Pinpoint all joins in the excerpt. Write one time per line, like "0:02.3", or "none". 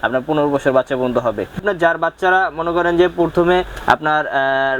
0:01.6